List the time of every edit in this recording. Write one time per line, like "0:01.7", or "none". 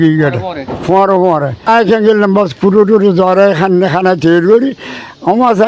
0:01.7